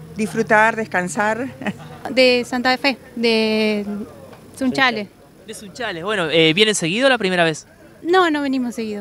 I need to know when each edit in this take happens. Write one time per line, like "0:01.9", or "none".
0:02.1